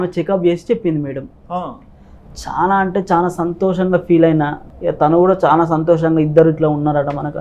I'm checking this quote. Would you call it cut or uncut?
cut